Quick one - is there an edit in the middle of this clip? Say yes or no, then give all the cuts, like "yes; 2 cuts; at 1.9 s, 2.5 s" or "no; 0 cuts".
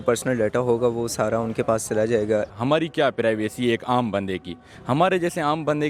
yes; 2 cuts; at 2.5 s, 4.7 s